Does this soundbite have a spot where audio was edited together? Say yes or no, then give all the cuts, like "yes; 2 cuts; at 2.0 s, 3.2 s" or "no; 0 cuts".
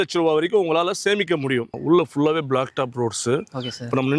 yes; 1 cut; at 1.7 s